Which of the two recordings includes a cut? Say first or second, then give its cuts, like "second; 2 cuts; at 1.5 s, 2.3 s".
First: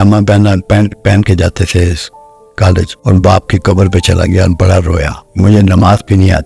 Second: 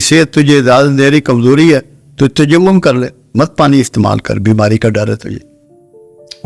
first; 2 cuts; at 2.9 s, 5.2 s